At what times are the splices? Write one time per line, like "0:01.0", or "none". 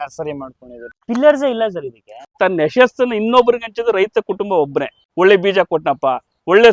0:01.0
0:02.4
0:05.0